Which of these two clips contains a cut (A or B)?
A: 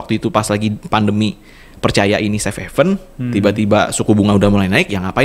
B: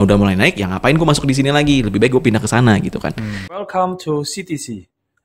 B